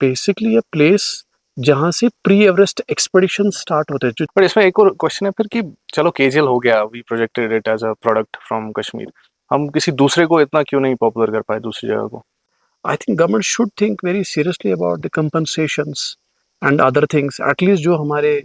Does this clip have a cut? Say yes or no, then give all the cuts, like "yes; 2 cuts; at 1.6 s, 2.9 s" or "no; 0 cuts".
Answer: yes; 2 cuts; at 4.2 s, 12.5 s